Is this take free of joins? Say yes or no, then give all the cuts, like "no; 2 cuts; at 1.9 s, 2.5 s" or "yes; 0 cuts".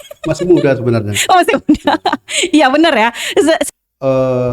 no; 1 cut; at 3.6 s